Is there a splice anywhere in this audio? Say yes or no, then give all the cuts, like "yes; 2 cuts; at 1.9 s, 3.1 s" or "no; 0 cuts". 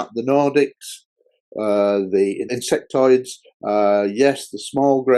yes; 1 cut; at 2.5 s